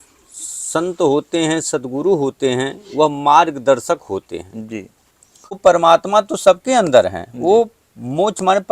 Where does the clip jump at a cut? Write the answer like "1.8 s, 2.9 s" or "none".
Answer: 5.6 s